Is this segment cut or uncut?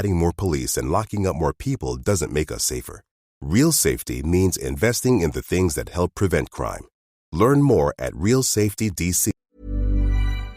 cut